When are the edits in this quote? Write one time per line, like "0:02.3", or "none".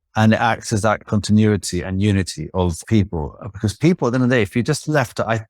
0:01.0
0:02.8

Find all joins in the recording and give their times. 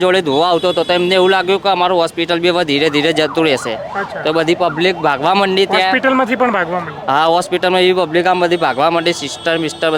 none

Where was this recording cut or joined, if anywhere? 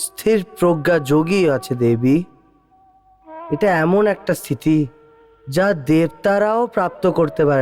none

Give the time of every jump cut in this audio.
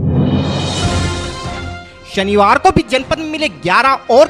0:01.9

